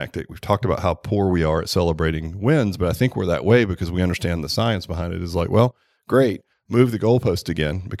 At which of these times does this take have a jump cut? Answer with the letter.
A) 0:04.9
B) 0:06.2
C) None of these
B